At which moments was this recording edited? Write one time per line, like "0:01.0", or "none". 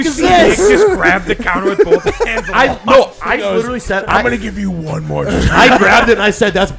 none